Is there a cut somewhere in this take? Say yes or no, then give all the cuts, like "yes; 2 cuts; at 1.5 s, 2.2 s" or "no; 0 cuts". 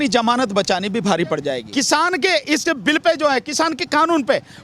yes; 1 cut; at 1.6 s